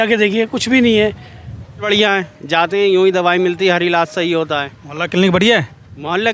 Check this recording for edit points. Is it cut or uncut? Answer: cut